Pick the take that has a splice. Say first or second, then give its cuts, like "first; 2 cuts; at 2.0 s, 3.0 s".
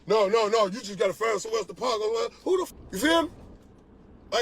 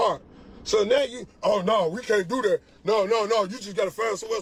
first; 1 cut; at 2.7 s